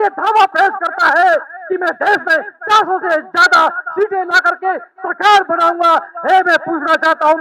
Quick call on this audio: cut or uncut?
uncut